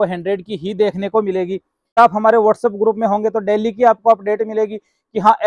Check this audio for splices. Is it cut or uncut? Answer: cut